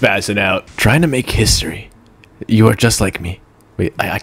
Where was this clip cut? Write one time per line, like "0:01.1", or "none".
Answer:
none

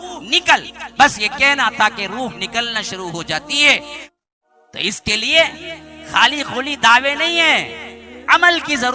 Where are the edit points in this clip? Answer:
0:04.0

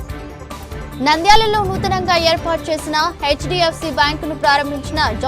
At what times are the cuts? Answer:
0:01.0

